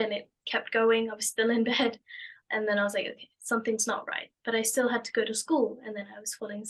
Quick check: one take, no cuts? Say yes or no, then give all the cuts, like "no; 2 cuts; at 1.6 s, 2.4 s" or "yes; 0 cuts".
yes; 0 cuts